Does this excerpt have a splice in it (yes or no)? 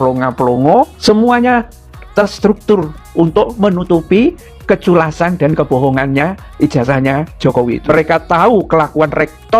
yes